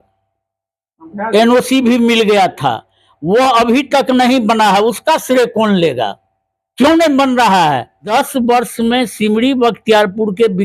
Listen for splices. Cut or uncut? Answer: cut